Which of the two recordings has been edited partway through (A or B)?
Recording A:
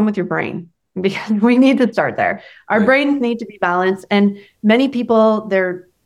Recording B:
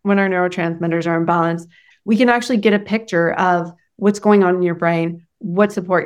B